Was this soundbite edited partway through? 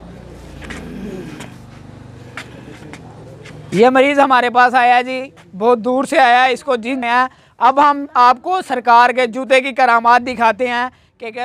no; 0 cuts

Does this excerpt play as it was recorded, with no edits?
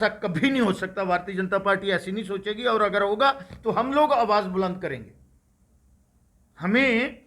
yes; 0 cuts

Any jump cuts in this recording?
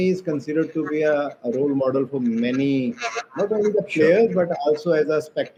no; 0 cuts

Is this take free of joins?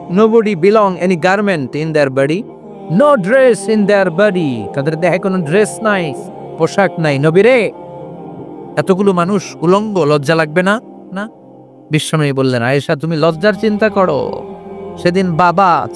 yes; 0 cuts

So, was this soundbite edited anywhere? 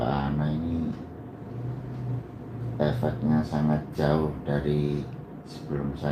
no; 0 cuts

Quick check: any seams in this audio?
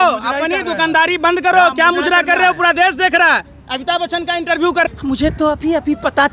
yes; 1 cut; at 4.9 s

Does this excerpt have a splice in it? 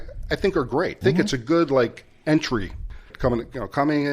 yes; 2 cuts; at 0.9 s, 2.8 s

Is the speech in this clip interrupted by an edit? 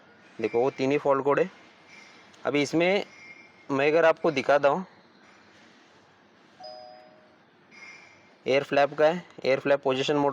no; 0 cuts

